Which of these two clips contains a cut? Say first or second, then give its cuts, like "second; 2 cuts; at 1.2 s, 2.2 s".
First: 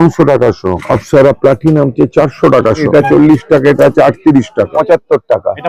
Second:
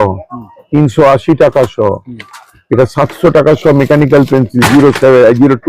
first; 3 cuts; at 0.8 s, 2.9 s, 4.7 s